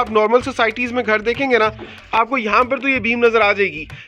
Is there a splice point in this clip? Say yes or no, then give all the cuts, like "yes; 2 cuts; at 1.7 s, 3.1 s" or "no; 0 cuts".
no; 0 cuts